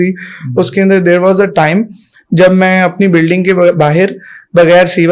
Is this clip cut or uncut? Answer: uncut